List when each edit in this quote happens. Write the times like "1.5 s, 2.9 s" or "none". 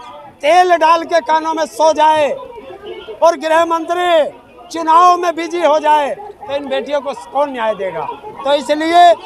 none